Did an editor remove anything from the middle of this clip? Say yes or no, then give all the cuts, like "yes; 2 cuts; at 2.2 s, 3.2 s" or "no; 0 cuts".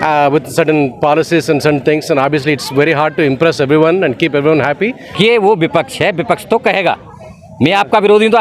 yes; 1 cut; at 5.1 s